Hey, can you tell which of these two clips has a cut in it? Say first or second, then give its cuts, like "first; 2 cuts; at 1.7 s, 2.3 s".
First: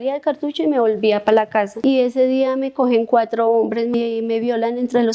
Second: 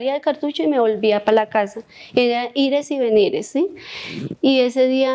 first; 2 cuts; at 1.7 s, 3.9 s